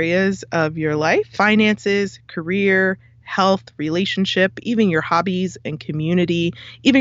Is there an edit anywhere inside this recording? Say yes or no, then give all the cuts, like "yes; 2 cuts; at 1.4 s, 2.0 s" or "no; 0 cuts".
yes; 1 cut; at 1.3 s